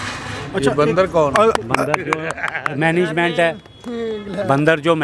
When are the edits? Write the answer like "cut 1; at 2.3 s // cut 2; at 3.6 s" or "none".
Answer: none